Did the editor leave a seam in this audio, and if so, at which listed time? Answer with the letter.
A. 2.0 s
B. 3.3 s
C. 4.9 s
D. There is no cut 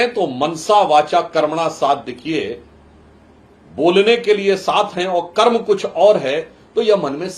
D